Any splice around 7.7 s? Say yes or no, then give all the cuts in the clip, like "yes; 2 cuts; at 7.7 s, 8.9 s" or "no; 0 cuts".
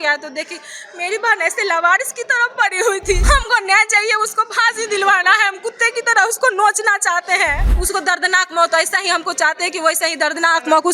yes; 2 cuts; at 3.2 s, 7.7 s